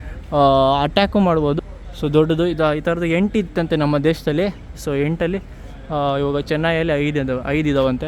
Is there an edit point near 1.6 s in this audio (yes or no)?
yes